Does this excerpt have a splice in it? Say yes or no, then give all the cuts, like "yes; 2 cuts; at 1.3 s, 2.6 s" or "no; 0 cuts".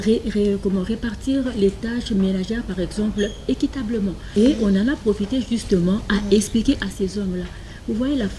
yes; 1 cut; at 4.2 s